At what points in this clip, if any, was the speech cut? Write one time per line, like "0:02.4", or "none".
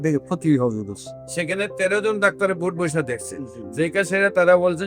none